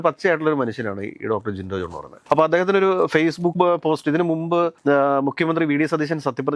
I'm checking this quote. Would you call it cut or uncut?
uncut